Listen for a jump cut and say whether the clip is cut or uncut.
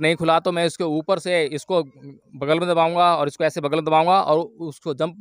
uncut